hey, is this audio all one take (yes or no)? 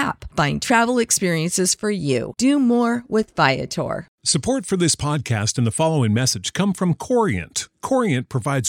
no